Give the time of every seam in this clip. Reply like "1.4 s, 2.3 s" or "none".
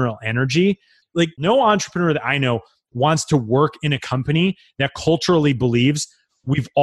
1.0 s